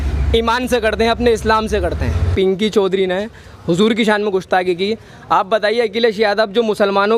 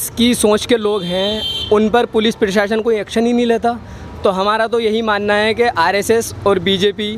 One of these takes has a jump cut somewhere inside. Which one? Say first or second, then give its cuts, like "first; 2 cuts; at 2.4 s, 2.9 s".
first; 1 cut; at 2.3 s